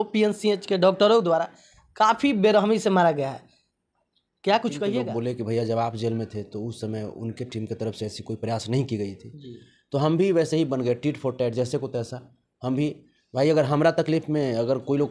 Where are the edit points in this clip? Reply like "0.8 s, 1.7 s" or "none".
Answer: 5.1 s